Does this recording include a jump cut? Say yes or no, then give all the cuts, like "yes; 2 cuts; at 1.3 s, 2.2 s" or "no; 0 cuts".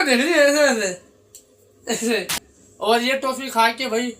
yes; 1 cut; at 2.6 s